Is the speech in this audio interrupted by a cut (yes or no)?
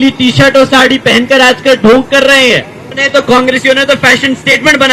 yes